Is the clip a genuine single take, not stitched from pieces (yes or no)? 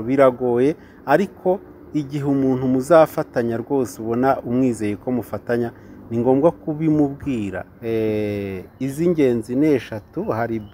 no